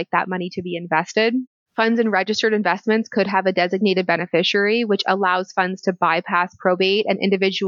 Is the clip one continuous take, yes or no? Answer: no